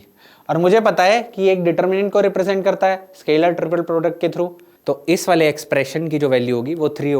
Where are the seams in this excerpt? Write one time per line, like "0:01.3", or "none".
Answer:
0:04.7

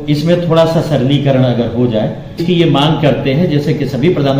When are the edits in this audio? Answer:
0:02.4

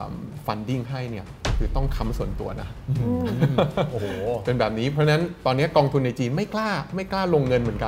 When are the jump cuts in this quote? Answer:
none

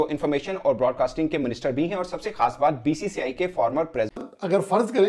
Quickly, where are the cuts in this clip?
0:04.2

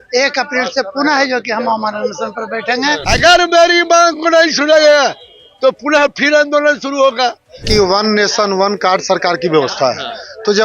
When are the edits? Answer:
0:03.0
0:07.6

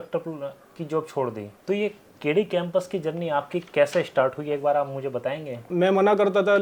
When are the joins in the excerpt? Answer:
0:01.5
0:05.7

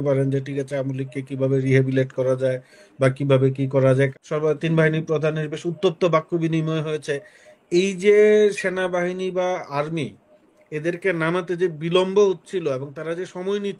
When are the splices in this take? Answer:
0:04.1

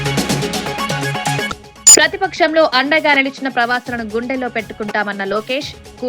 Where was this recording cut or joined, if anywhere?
0:01.5

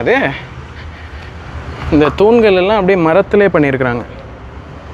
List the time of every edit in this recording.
none

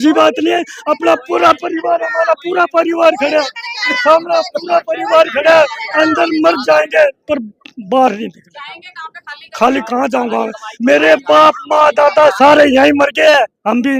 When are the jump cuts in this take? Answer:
none

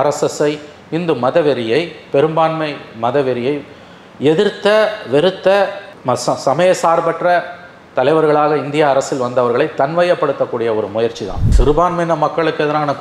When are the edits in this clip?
0:11.5

